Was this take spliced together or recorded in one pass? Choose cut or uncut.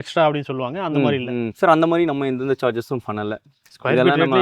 cut